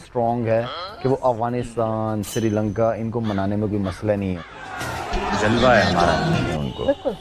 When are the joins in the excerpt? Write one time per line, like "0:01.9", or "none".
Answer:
0:01.7
0:04.5
0:06.3